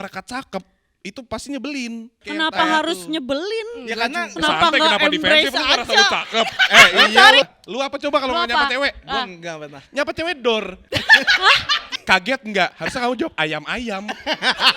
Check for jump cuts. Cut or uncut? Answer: cut